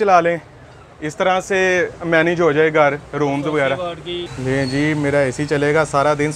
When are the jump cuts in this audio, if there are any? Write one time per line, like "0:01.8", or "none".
0:04.3